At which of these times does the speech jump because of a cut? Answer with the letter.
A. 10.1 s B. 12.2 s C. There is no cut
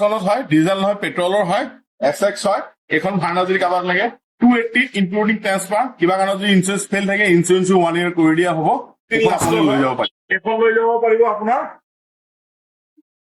A